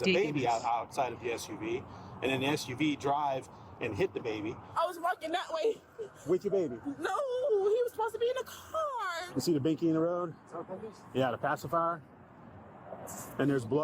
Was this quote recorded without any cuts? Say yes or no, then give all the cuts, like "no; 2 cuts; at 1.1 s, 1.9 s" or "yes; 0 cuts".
no; 2 cuts; at 4.6 s, 9.2 s